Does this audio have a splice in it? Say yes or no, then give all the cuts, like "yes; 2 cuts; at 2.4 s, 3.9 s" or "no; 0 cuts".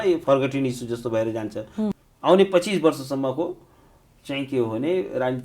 yes; 1 cut; at 1.9 s